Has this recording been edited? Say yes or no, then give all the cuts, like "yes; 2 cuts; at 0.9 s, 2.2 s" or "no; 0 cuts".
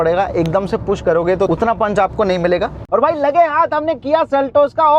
yes; 2 cuts; at 1.5 s, 2.8 s